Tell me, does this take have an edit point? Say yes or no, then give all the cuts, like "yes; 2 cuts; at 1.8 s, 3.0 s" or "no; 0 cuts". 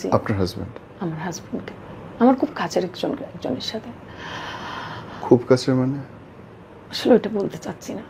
no; 0 cuts